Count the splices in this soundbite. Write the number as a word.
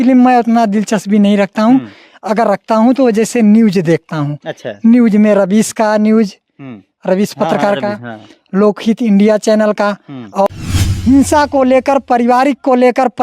one